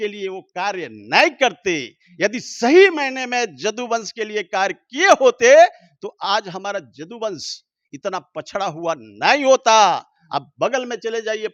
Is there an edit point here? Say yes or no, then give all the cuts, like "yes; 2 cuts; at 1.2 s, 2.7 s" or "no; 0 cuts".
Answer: no; 0 cuts